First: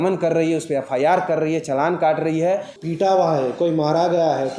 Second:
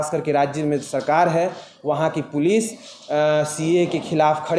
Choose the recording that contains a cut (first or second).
first